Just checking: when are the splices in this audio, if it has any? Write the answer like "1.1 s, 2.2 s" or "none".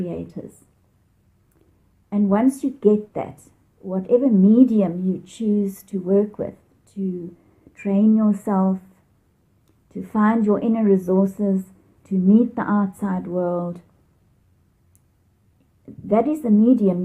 none